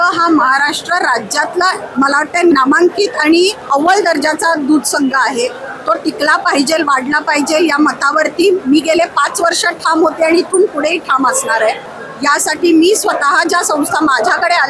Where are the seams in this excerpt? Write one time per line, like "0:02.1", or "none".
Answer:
0:01.8
0:03.6
0:11.9

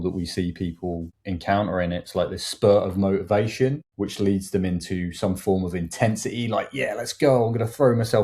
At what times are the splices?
0:01.1
0:03.9

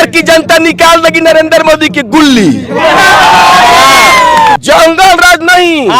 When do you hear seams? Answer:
0:04.6

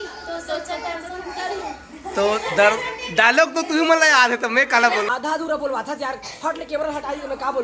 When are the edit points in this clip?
0:05.1

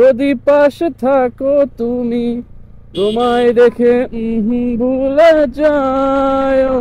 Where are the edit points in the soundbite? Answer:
none

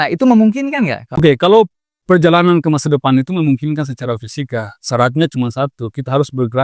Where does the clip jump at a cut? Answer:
0:01.2

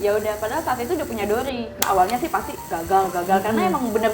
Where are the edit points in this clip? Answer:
0:01.8

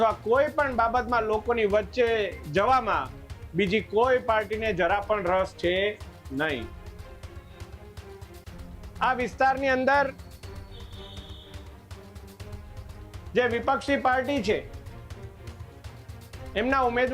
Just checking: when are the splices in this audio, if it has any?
none

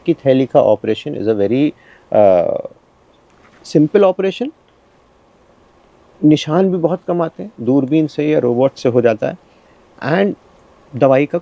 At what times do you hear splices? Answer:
none

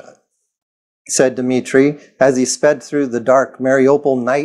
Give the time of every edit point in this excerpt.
none

